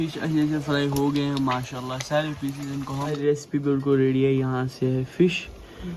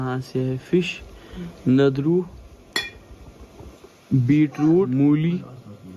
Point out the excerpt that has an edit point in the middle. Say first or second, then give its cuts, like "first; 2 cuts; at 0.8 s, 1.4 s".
first; 1 cut; at 3.2 s